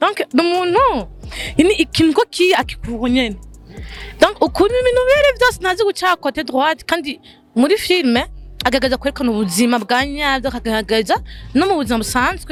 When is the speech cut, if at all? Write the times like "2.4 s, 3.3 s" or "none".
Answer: none